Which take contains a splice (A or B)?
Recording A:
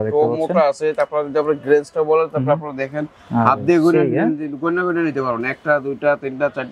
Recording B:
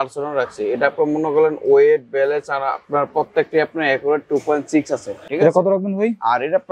B